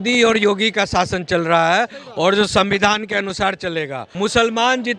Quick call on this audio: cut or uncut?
cut